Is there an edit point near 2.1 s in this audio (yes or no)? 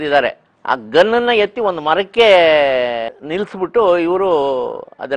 no